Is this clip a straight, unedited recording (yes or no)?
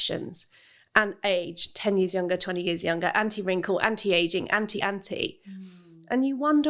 yes